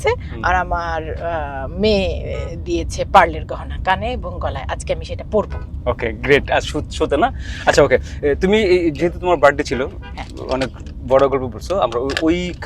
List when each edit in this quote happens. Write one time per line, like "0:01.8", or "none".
none